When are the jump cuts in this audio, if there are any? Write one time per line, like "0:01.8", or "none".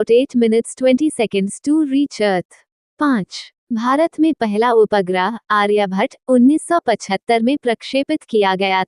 0:03.0